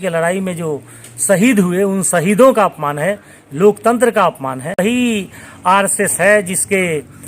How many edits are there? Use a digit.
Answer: 1